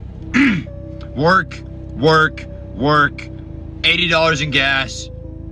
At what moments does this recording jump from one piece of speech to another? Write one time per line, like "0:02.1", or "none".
none